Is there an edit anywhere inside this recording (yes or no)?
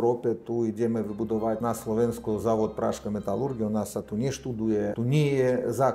yes